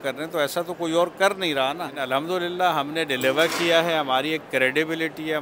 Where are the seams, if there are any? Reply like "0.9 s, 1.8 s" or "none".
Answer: 2.0 s